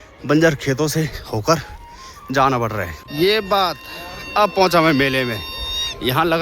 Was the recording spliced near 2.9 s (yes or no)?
yes